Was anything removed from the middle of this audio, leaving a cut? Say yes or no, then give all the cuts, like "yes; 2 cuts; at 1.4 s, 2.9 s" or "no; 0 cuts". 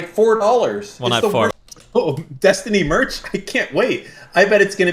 yes; 1 cut; at 1.6 s